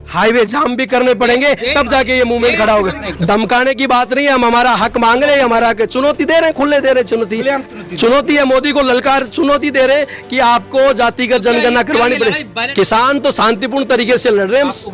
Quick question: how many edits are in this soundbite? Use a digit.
2